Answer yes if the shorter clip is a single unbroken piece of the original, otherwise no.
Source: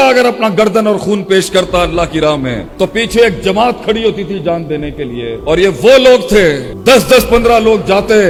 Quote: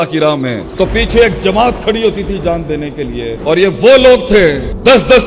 yes